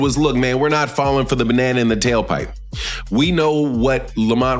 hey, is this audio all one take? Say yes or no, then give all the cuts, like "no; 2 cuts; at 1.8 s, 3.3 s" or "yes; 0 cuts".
no; 1 cut; at 1.1 s